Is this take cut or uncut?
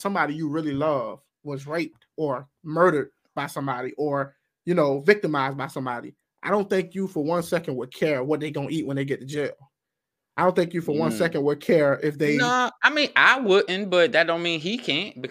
uncut